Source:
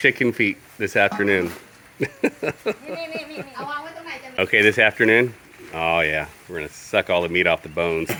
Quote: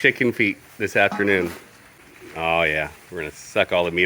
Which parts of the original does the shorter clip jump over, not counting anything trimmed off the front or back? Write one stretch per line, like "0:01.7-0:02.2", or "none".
0:02.0-0:05.3